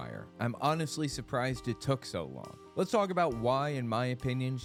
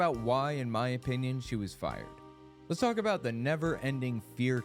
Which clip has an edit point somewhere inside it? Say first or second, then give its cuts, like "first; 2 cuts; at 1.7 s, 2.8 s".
second; 1 cut; at 2.5 s